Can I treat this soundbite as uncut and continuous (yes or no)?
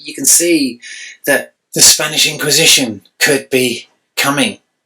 no